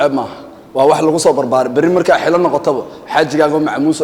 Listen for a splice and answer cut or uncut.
uncut